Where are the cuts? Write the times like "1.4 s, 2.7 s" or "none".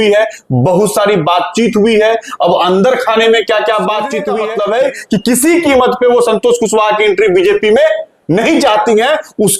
4.3 s